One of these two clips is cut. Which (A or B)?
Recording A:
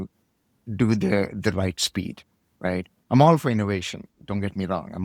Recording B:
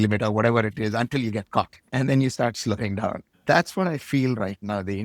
B